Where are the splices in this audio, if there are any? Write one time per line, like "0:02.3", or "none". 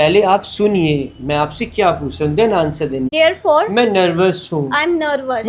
0:03.1